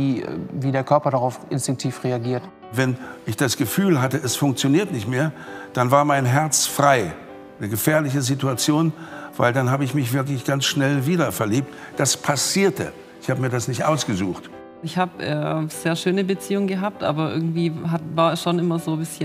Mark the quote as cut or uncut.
cut